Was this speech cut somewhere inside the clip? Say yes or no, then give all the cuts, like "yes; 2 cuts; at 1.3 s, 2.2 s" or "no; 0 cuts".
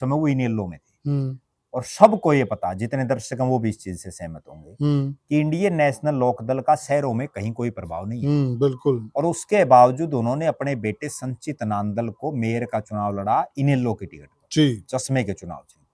no; 0 cuts